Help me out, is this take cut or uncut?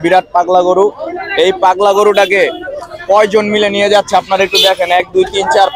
uncut